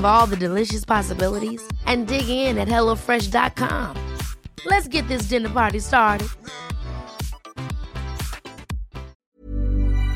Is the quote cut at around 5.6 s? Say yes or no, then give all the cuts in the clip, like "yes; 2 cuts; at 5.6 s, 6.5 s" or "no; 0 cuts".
no; 1 cut; at 9.2 s